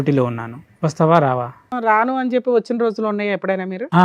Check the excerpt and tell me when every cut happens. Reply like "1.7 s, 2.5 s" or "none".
1.7 s